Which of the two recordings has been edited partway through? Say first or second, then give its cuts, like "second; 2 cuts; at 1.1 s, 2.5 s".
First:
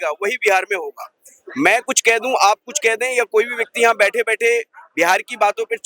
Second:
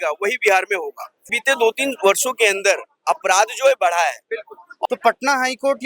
second; 2 cuts; at 1.3 s, 4.7 s